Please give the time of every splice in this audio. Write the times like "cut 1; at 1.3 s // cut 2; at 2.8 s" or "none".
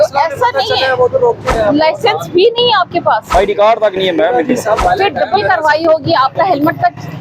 cut 1; at 1.4 s // cut 2; at 3.2 s // cut 3; at 4.8 s